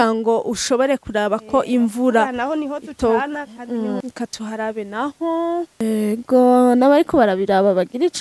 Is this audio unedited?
no; 2 cuts; at 4.0 s, 5.8 s

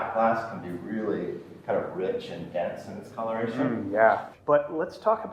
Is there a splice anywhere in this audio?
yes; 1 cut; at 4.3 s

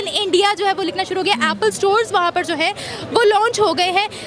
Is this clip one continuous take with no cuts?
yes; 0 cuts

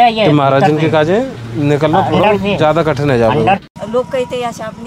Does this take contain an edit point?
yes; 1 cut; at 3.6 s

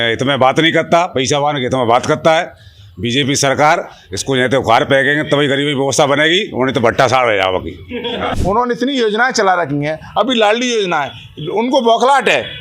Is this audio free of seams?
no; 1 cut; at 7.9 s

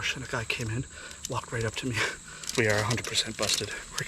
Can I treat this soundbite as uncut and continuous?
no; 1 cut; at 2.5 s

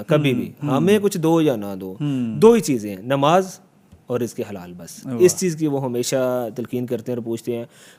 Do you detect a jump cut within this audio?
no; 0 cuts

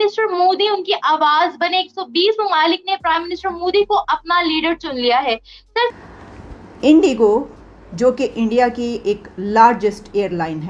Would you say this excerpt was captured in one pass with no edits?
no; 1 cut; at 5.9 s

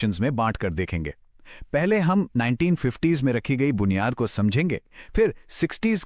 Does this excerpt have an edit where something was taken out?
no; 0 cuts

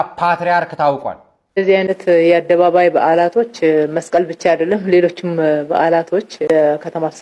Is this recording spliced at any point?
yes; 1 cut; at 1.4 s

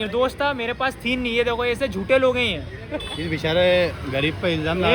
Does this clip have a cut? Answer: yes; 1 cut; at 2.8 s

